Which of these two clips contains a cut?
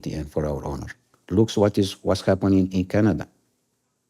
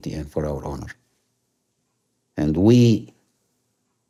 first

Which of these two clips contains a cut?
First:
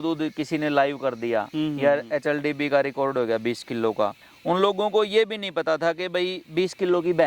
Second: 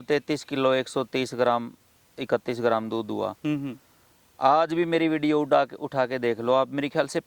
first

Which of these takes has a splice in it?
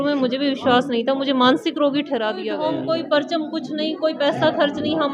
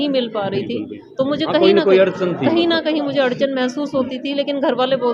first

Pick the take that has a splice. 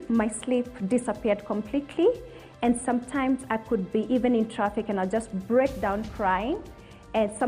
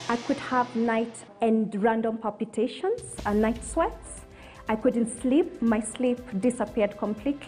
second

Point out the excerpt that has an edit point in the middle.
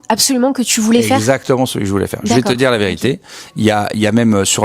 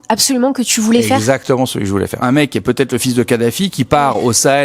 second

